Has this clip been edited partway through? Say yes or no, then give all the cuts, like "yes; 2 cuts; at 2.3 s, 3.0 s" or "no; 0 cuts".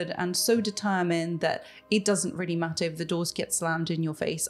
no; 0 cuts